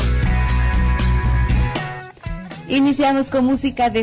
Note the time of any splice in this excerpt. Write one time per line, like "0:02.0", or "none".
none

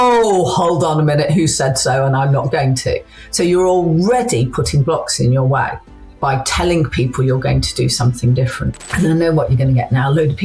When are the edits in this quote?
0:08.8

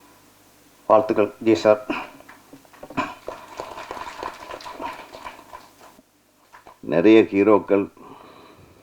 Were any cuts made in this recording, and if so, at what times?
0:06.6

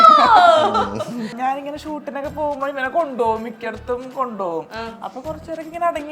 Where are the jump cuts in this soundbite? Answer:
0:01.3

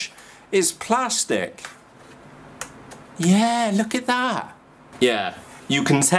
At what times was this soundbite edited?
0:04.8

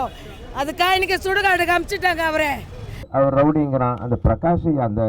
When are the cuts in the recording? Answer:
0:03.0

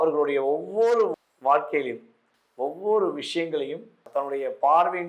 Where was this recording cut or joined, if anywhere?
0:04.1

